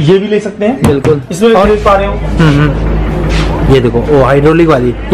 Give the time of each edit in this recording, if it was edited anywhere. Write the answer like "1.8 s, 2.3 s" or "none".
1.7 s